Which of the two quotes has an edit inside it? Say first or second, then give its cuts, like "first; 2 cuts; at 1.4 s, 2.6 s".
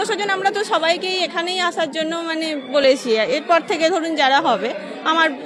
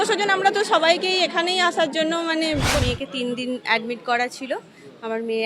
second; 1 cut; at 2.7 s